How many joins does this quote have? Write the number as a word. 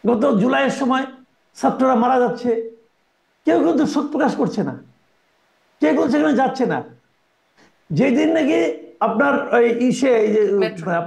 zero